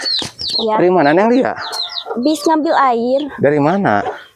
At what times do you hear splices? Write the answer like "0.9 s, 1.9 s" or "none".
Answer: none